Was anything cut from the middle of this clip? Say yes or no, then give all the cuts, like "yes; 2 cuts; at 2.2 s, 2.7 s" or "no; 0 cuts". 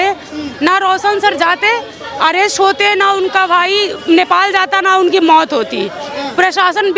no; 0 cuts